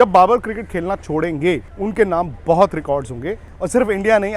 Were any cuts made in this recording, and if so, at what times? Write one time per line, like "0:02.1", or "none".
0:01.7
0:03.5